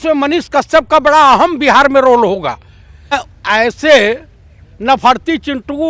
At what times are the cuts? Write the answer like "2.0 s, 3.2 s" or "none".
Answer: 3.2 s